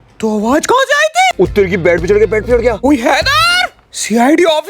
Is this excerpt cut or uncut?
cut